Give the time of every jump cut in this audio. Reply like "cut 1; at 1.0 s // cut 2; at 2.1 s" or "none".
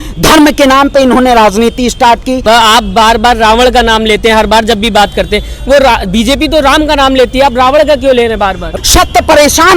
cut 1; at 2.4 s // cut 2; at 8.7 s